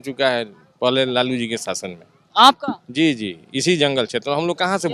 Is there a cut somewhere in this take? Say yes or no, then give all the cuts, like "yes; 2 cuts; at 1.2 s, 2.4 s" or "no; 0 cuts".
no; 0 cuts